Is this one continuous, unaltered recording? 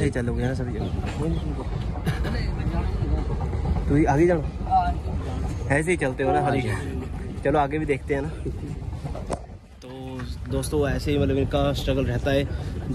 yes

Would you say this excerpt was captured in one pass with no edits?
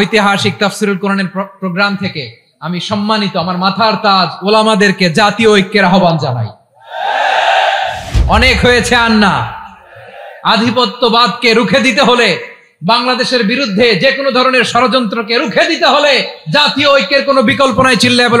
no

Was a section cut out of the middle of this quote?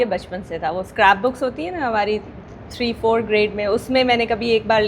no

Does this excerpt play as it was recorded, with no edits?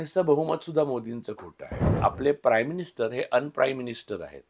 no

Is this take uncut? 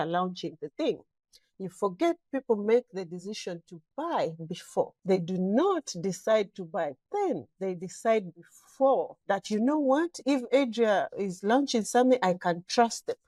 yes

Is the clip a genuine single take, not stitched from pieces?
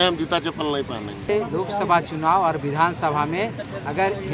no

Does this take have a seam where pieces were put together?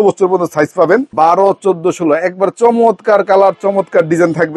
no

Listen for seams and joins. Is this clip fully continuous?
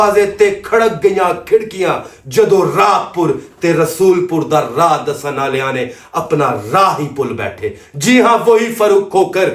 yes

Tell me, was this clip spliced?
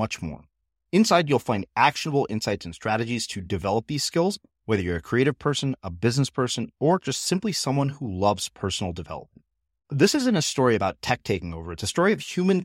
no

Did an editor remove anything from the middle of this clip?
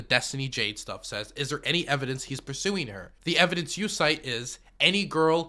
yes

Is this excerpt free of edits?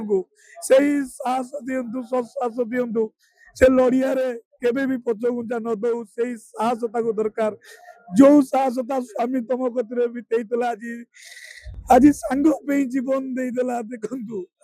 yes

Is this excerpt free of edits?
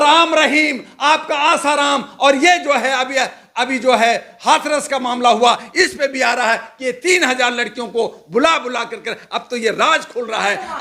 yes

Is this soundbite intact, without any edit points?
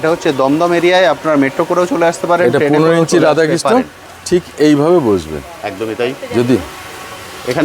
yes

